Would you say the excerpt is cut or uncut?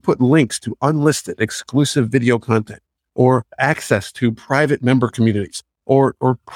uncut